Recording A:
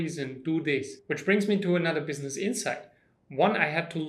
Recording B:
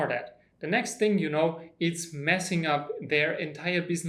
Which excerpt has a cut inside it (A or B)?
A